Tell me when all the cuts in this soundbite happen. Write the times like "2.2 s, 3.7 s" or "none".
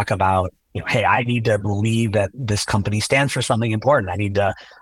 1.1 s